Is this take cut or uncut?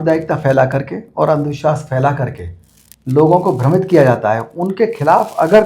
uncut